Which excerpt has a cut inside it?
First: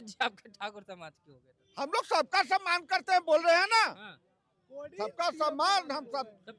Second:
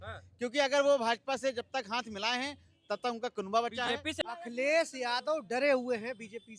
second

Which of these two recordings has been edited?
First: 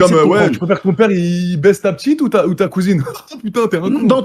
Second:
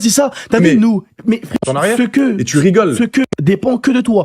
second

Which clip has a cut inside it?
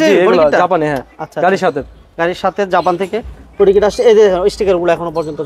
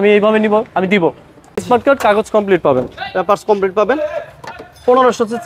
second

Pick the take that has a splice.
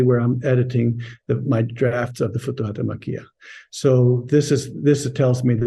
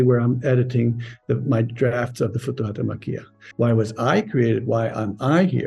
second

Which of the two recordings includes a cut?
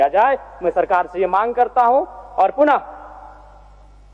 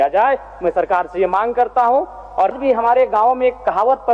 second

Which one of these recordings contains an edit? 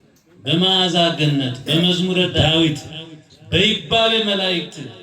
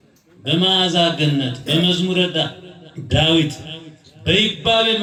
first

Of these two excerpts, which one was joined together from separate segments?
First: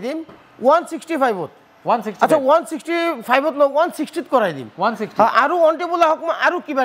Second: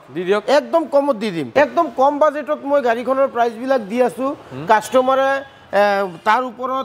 second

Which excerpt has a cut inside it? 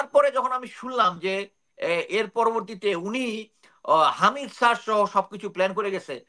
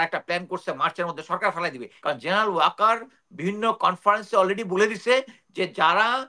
second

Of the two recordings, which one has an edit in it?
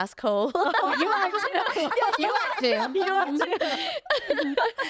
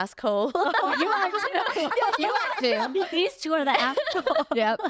second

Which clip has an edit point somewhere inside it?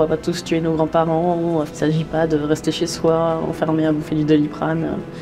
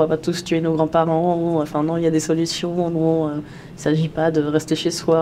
first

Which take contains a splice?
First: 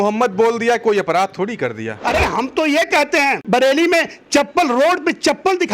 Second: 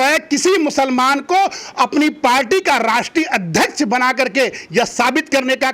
first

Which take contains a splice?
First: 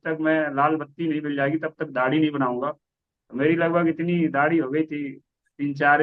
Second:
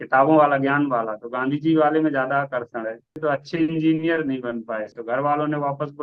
second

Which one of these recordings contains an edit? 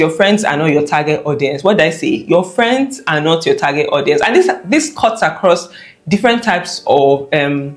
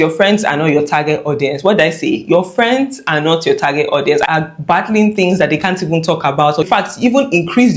second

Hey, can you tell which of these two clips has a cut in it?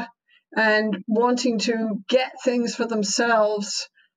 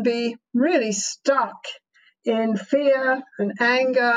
first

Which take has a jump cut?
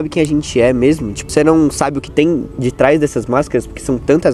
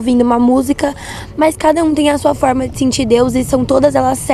first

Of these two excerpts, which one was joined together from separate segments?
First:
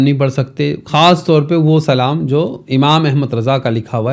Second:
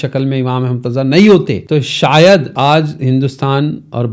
second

